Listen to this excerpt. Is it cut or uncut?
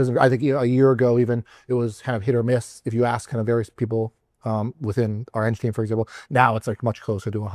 uncut